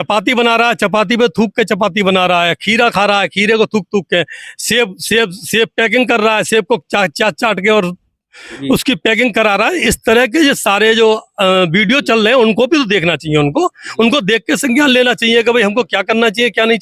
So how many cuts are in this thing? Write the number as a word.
zero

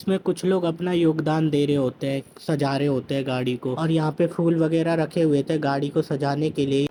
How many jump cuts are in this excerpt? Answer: zero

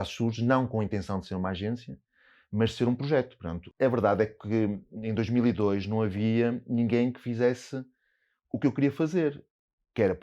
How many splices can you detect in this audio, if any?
one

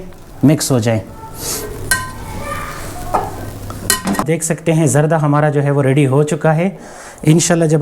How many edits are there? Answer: one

